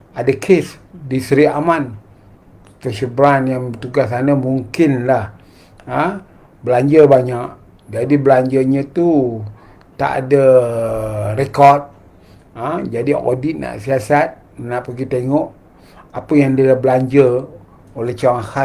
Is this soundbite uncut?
yes; 0 cuts

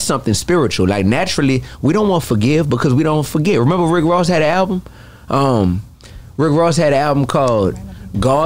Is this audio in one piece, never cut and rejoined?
yes; 0 cuts

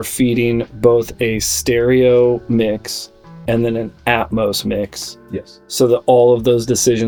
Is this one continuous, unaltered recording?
yes; 0 cuts

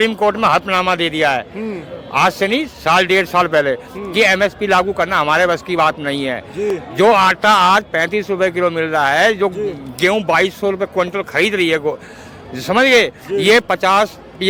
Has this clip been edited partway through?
no; 0 cuts

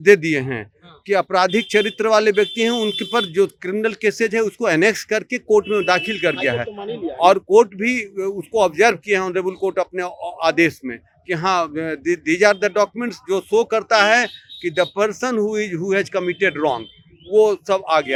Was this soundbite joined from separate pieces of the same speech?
no; 0 cuts

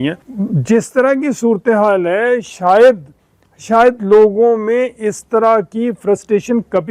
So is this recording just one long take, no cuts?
yes; 0 cuts

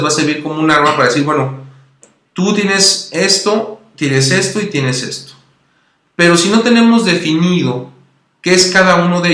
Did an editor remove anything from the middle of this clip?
yes; 1 cut; at 4.8 s

